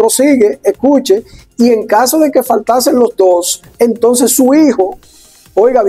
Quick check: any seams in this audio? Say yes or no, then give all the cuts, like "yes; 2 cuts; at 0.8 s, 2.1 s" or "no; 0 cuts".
no; 0 cuts